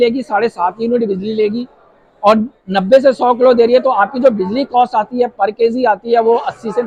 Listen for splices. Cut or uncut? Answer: uncut